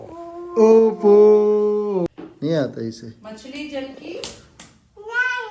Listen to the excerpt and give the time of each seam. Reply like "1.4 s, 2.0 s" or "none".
2.1 s

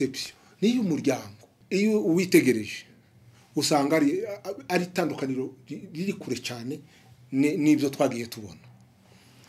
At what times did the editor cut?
1.6 s

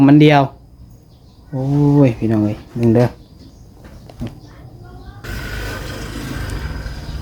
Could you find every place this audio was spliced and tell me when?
5.2 s

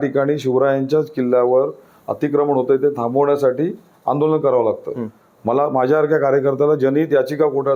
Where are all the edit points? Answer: none

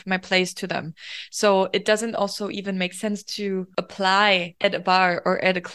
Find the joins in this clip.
3.7 s, 4.5 s

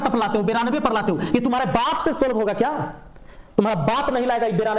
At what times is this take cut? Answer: none

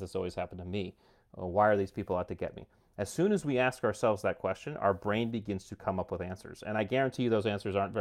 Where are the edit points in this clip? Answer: none

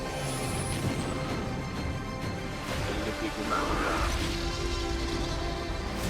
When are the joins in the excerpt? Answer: none

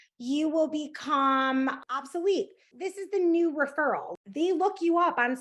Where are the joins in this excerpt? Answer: 1.8 s, 2.7 s, 4.1 s

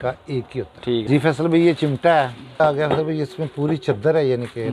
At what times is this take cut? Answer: 1.0 s, 2.6 s

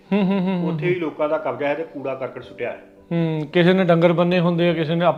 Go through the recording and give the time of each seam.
none

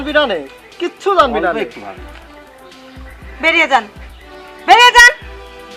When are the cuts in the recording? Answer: none

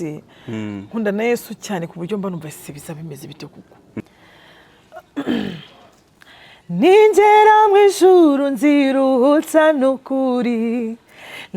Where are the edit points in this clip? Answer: 4.0 s

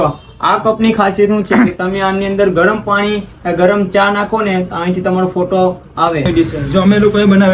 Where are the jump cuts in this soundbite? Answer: 6.3 s

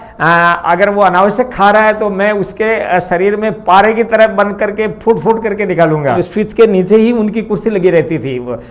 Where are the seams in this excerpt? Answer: 6.2 s

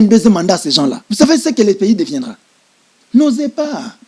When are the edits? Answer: 1.0 s

